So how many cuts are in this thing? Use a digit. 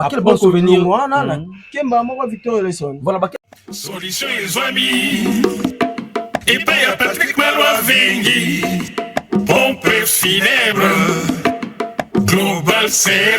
1